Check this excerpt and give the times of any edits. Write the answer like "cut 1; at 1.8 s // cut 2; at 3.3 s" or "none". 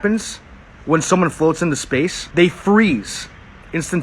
cut 1; at 2.2 s